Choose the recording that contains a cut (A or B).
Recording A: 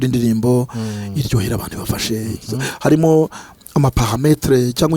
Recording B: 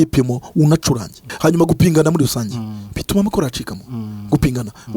B